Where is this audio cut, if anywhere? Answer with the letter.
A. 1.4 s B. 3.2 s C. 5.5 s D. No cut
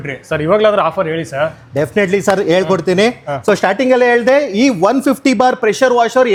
D